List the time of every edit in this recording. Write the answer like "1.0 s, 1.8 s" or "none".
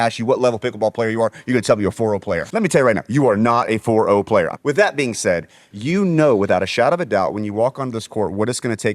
2.4 s, 4.6 s, 5.7 s